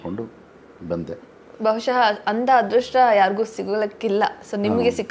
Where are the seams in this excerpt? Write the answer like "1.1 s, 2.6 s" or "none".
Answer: none